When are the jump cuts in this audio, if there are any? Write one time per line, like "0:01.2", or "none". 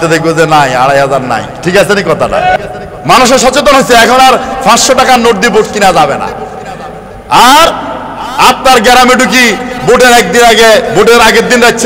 0:02.6